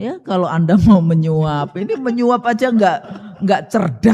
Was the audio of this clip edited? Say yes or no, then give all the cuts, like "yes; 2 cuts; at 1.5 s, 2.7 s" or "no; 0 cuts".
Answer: no; 0 cuts